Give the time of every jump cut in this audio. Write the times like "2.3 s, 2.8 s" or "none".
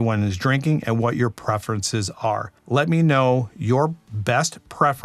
2.5 s